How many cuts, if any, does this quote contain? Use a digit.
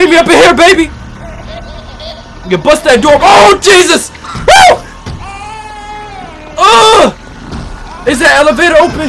0